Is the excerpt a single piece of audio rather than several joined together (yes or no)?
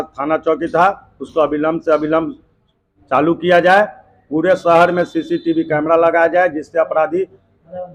yes